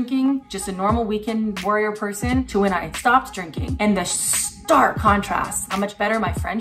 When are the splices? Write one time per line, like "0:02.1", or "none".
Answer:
0:05.6